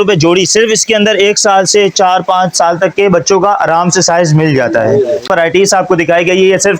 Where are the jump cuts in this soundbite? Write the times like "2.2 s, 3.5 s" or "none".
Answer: 5.2 s